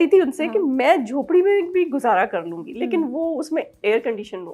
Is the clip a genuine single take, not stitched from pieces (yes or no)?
yes